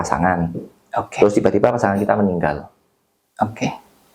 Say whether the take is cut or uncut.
uncut